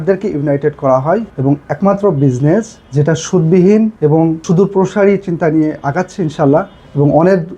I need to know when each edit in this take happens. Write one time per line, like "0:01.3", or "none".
0:01.3
0:02.8
0:04.1

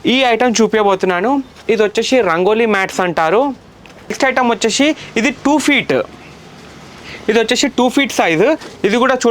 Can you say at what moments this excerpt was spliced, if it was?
0:04.1

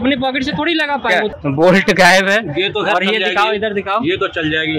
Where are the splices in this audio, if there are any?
0:01.3

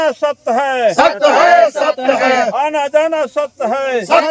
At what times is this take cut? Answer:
none

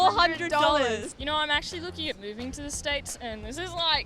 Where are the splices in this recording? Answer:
0:01.1

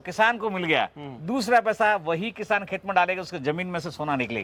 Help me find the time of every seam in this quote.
none

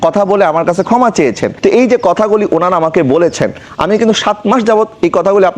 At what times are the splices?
none

